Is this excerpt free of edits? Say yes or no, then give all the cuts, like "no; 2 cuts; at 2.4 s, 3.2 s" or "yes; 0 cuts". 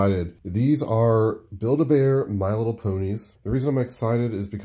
no; 1 cut; at 3.3 s